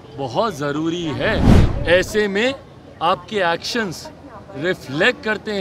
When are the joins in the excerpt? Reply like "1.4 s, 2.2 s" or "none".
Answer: 1.6 s